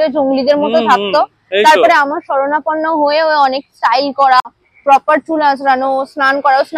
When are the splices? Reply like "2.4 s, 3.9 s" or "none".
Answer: 4.5 s